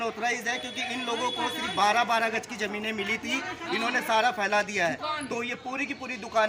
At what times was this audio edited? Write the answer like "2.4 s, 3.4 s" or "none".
none